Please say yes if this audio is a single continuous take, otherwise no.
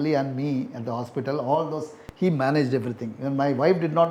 yes